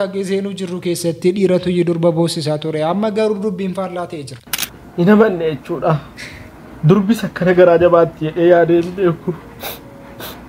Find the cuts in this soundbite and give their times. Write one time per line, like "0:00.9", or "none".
0:04.4